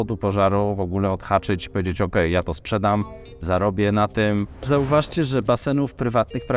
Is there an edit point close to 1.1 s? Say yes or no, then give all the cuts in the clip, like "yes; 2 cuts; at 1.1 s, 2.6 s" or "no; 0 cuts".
no; 1 cut; at 4.6 s